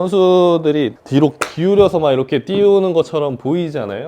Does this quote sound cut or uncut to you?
cut